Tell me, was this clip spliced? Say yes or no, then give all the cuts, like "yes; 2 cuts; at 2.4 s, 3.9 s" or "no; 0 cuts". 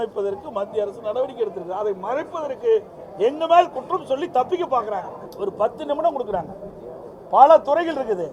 yes; 1 cut; at 5.2 s